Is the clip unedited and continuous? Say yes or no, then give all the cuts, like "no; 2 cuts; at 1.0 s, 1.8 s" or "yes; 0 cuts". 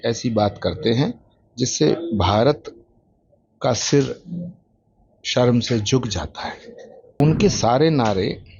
no; 1 cut; at 7.2 s